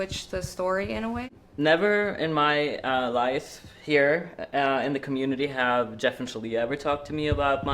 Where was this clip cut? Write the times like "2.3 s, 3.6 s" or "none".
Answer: 1.4 s